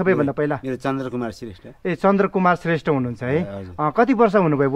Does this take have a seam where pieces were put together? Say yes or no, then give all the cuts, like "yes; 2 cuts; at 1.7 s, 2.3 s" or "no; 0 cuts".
no; 0 cuts